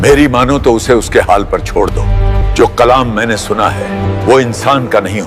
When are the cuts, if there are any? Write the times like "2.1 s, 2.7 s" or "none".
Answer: 2.4 s, 4.1 s